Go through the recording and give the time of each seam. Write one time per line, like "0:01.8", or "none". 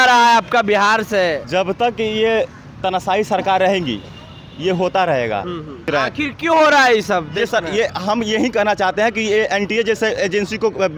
0:01.4
0:05.9